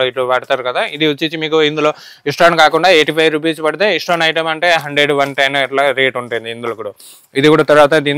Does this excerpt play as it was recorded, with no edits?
yes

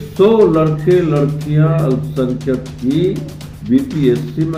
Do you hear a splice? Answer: no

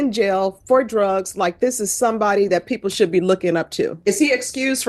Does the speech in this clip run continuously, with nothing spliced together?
no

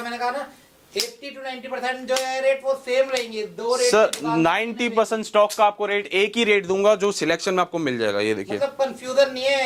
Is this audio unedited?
yes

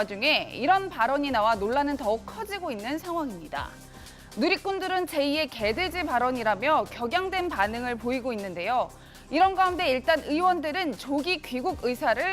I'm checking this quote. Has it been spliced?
yes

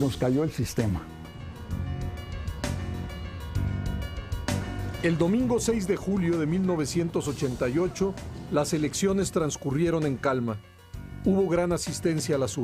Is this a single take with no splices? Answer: no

